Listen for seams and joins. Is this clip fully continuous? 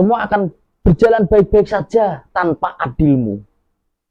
yes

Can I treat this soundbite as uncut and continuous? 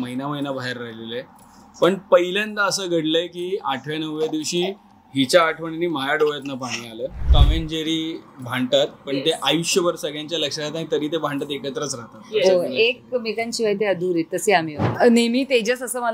no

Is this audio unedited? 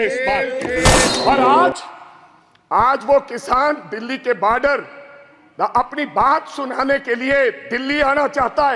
no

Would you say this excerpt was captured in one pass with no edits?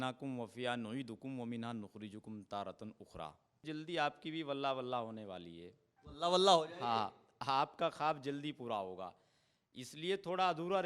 no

